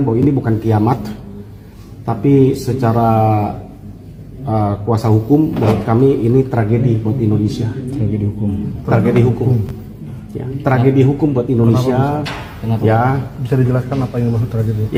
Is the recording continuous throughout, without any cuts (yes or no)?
yes